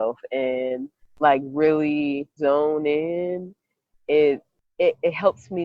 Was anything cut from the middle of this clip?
yes; 2 cuts; at 2.3 s, 4.6 s

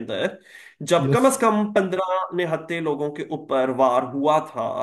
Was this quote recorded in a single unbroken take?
yes; 0 cuts

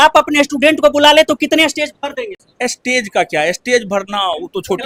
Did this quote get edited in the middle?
no; 0 cuts

